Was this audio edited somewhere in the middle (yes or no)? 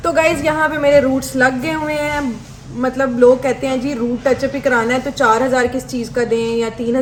no